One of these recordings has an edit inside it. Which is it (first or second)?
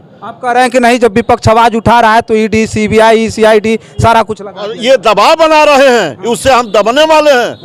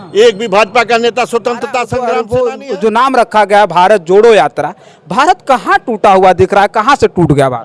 second